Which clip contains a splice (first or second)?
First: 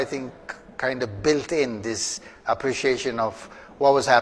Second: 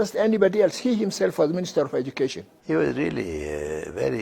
second